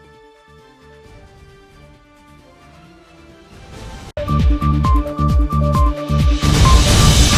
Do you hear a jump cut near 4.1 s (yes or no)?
no